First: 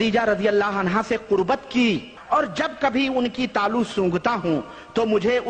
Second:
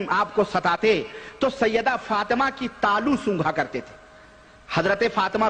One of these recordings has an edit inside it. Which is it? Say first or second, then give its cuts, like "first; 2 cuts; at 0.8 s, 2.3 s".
first; 1 cut; at 2.1 s